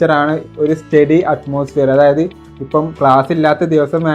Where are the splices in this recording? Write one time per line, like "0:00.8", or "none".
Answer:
none